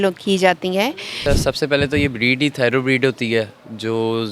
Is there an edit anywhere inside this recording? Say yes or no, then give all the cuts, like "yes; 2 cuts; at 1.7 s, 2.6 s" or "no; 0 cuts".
yes; 1 cut; at 1.1 s